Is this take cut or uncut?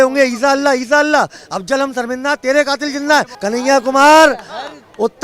cut